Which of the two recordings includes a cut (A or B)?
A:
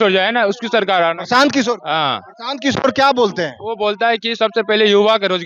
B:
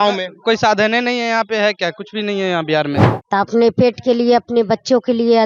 B